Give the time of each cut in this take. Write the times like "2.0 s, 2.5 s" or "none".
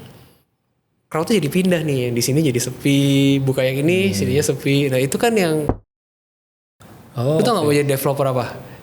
6.3 s